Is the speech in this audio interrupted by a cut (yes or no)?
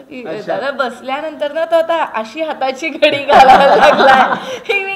no